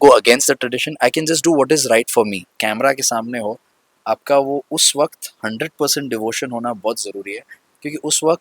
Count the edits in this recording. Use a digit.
1